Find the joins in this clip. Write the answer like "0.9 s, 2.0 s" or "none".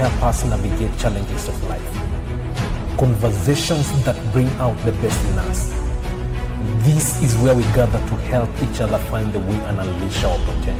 none